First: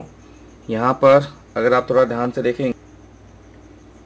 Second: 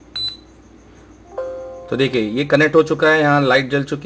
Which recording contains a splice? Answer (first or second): first